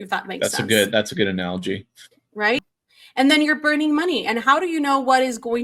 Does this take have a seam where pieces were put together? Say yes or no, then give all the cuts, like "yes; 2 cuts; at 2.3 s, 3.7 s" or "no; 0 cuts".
yes; 1 cut; at 2.6 s